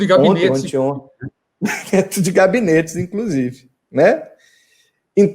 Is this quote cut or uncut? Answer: uncut